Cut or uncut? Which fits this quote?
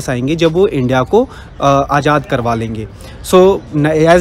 uncut